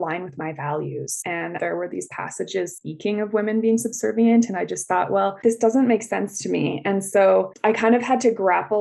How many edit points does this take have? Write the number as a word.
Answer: one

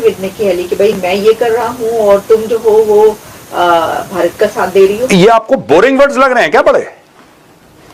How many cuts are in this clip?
one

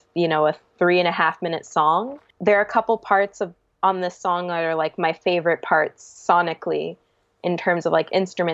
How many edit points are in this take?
one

